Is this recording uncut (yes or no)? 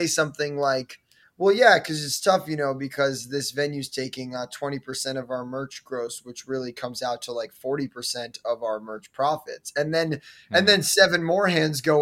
yes